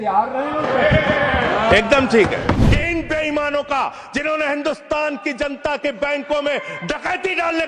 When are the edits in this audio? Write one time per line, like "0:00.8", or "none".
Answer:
0:02.5

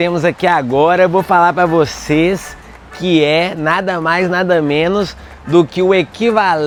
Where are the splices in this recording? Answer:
none

